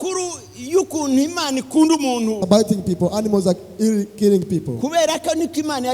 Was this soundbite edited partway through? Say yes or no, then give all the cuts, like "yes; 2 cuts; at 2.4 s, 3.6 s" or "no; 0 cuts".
yes; 1 cut; at 2.4 s